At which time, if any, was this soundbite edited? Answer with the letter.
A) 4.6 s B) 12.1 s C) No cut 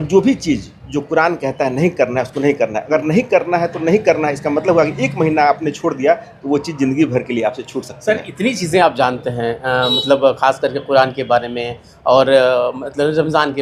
C